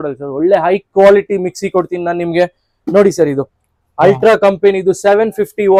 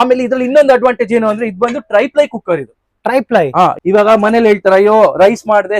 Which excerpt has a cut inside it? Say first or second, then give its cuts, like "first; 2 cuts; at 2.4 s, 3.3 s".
second; 1 cut; at 3.8 s